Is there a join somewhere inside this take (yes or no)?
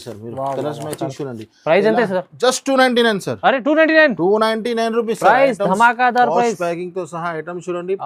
no